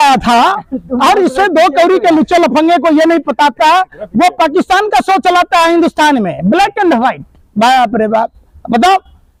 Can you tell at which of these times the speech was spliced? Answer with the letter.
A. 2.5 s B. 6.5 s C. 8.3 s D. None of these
D